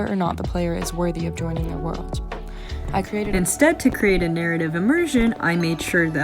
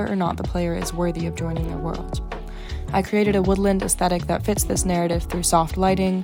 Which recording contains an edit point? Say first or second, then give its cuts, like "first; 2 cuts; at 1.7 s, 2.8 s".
first; 1 cut; at 3.3 s